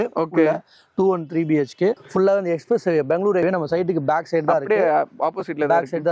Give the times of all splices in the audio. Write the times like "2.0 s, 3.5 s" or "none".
2.2 s, 3.4 s